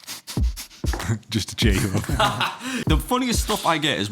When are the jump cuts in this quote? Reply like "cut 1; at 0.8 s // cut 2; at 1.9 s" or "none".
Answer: cut 1; at 2.8 s